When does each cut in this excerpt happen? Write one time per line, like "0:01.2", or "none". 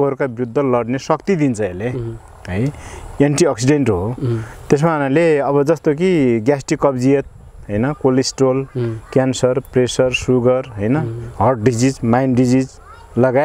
none